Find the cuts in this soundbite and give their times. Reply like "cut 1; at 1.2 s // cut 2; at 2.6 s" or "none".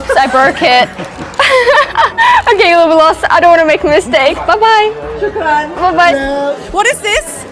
cut 1; at 1.1 s // cut 2; at 6.1 s